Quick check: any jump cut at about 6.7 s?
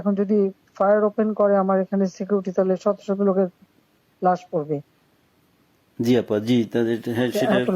no; 0 cuts

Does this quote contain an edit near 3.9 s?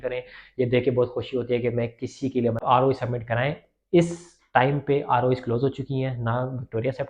no; 1 cut; at 2.6 s

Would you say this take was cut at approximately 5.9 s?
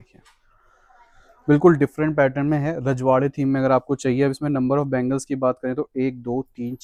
no; 0 cuts

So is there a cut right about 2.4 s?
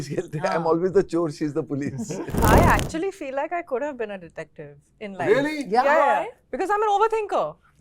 yes; 1 cut; at 2.4 s

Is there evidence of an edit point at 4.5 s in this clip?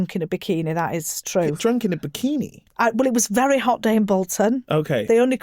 no; 1 cut; at 1.6 s

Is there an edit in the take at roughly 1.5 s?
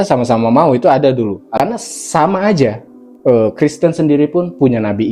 yes; 1 cut; at 1.5 s

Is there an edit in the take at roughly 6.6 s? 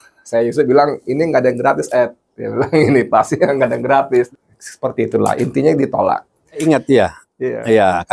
yes; 2 cuts; at 4.3 s, 6.6 s

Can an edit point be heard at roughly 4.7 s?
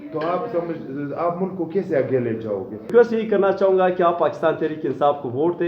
no; 1 cut; at 2.9 s

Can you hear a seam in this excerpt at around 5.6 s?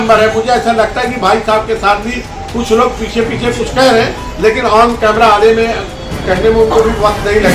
no; 0 cuts

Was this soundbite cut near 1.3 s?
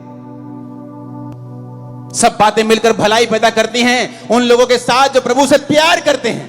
yes; 1 cut; at 1.3 s

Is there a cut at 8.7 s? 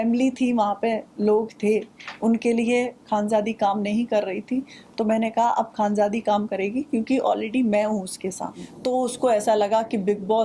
yes; 1 cut; at 8.7 s

